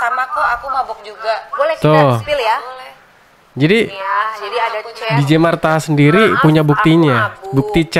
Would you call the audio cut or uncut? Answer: uncut